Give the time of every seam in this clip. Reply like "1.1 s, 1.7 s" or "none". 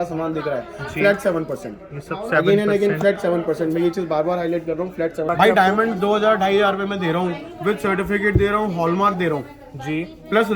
5.3 s